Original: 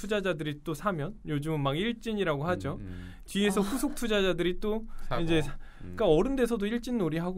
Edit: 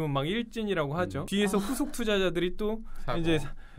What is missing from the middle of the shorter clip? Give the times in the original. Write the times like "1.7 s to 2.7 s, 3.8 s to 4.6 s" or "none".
2.7 s to 3.2 s